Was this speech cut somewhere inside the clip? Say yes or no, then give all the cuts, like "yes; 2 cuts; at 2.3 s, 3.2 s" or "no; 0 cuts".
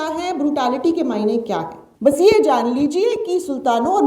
yes; 1 cut; at 1.8 s